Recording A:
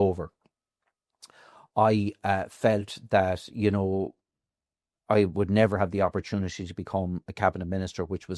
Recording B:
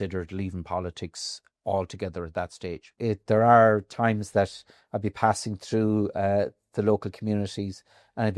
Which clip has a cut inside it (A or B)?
B